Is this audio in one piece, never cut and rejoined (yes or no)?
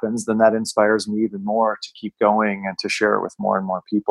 yes